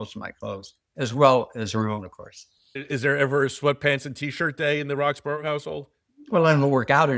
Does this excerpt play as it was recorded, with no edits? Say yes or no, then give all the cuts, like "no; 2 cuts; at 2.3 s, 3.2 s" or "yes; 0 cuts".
no; 1 cut; at 2.7 s